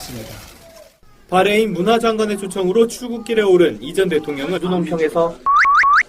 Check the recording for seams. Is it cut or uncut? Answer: uncut